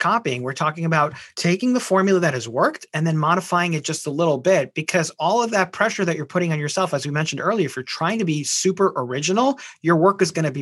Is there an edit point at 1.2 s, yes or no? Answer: yes